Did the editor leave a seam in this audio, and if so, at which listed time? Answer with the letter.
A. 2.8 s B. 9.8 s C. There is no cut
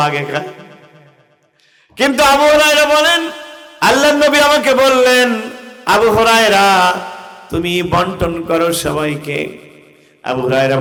C